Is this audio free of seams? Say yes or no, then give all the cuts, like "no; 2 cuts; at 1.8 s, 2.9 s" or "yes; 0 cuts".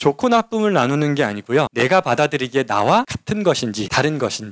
no; 2 cuts; at 1.7 s, 3.5 s